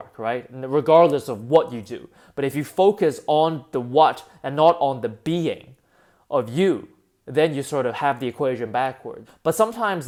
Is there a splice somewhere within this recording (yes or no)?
no